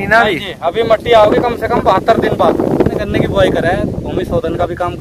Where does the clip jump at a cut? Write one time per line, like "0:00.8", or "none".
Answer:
0:03.0